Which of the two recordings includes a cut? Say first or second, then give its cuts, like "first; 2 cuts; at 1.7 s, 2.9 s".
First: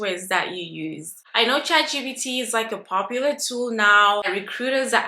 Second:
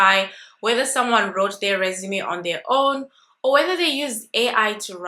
first; 2 cuts; at 1.2 s, 4.3 s